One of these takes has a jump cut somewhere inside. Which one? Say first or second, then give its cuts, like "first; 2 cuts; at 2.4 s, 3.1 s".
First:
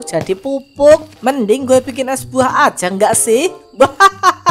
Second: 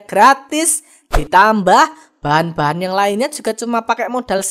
first; 1 cut; at 1.1 s